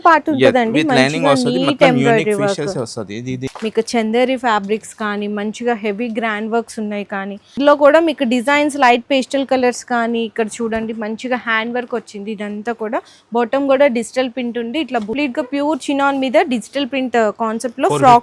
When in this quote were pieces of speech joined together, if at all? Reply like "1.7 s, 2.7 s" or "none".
3.5 s, 7.6 s, 15.1 s